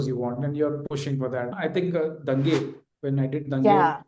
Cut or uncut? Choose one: cut